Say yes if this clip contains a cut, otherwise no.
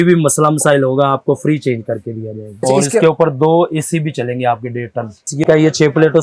yes